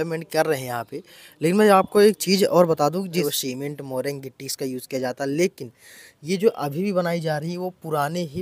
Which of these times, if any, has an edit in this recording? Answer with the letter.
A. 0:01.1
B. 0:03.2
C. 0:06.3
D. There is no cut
B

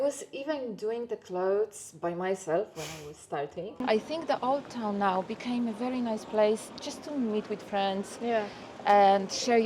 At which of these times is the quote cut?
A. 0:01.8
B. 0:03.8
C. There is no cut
B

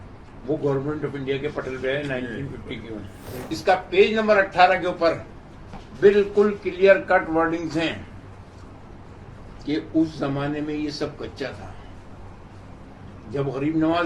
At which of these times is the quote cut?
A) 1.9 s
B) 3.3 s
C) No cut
B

